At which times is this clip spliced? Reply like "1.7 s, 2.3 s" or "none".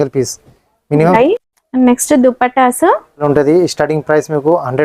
1.1 s, 3.2 s